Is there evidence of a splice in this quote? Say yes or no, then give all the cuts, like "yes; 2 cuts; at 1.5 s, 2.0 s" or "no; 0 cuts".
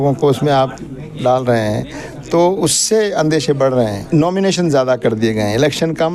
yes; 1 cut; at 4.0 s